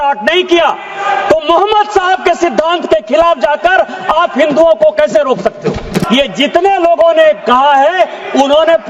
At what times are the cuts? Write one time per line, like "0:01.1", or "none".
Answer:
0:06.0